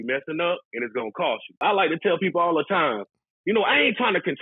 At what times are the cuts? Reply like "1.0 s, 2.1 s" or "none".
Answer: 1.6 s